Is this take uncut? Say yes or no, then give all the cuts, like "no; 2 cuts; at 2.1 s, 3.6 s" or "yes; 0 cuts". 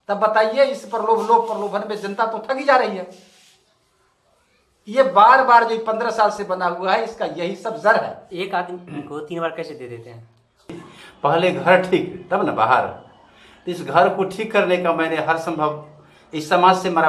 no; 1 cut; at 10.7 s